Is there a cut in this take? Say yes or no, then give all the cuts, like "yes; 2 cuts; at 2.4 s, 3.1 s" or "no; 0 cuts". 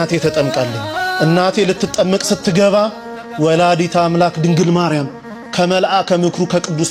no; 0 cuts